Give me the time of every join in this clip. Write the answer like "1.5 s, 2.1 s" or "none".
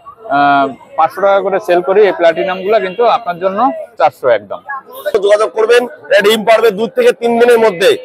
5.1 s

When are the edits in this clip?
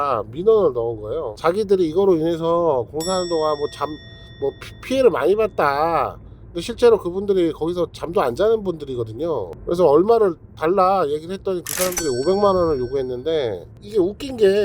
1.3 s, 9.5 s, 13.7 s

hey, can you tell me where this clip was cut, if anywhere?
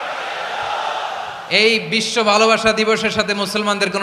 none

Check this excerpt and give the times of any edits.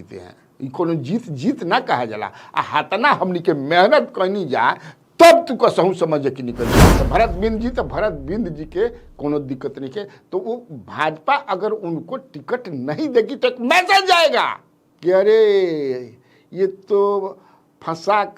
6.9 s

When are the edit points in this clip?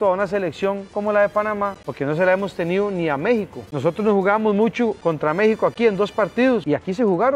1.8 s, 3.6 s, 5.0 s, 6.6 s

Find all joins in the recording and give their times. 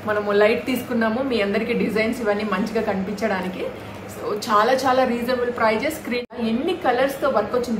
6.3 s

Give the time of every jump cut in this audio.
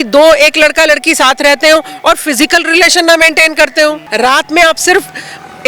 4.0 s

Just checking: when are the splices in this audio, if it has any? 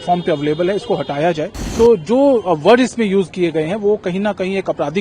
1.6 s

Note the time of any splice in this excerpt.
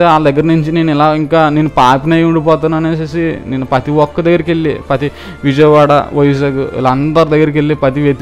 none

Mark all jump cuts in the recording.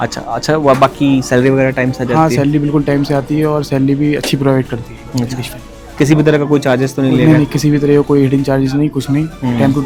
none

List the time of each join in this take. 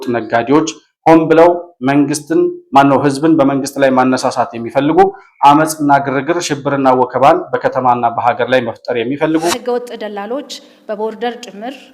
9.5 s

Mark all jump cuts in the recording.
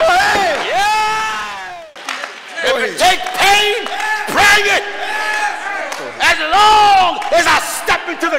1.5 s

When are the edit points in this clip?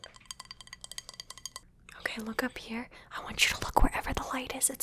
1.8 s

